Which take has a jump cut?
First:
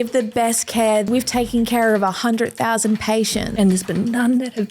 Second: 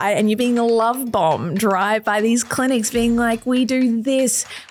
first; 2 cuts; at 1.1 s, 3.5 s

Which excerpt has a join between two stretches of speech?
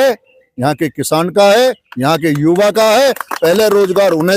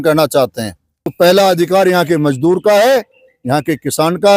second; 1 cut; at 1.1 s

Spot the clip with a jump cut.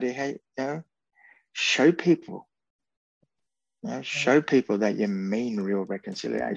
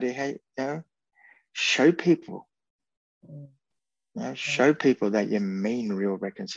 first; 1 cut; at 3.2 s

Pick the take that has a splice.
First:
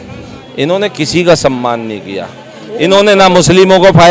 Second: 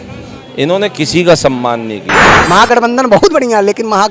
second; 1 cut; at 2.4 s

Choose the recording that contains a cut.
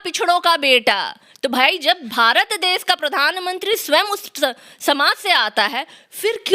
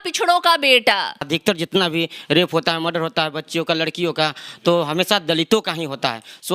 second; 1 cut; at 1.2 s

